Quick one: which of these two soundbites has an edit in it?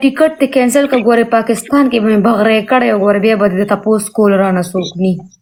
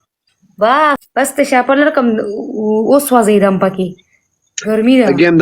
second; 1 cut; at 1.0 s

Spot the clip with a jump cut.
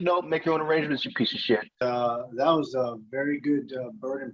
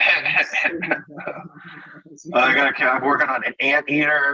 first; 1 cut; at 1.7 s

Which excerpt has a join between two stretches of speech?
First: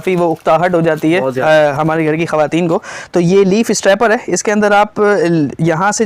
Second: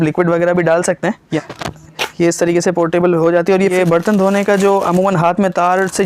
second; 2 cuts; at 1.4 s, 3.7 s

